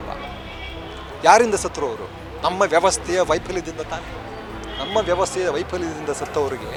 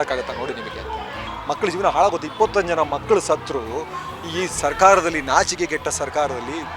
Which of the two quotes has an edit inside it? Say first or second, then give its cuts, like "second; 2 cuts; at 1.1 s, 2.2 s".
second; 1 cut; at 1.2 s